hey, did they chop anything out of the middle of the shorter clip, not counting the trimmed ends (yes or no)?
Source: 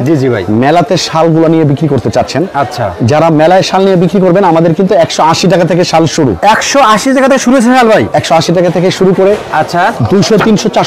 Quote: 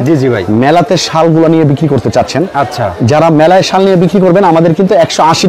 no